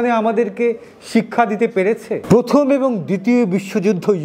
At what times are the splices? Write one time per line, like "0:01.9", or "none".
0:02.1